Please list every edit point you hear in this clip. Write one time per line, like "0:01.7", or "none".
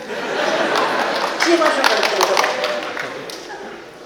none